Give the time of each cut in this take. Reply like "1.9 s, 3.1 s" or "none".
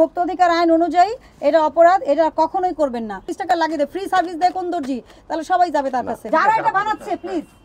3.3 s, 6.2 s